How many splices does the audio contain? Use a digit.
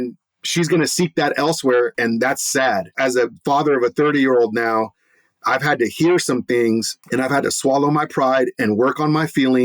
3